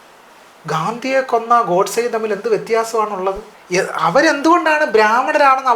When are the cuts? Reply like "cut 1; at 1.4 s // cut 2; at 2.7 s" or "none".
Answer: cut 1; at 3.5 s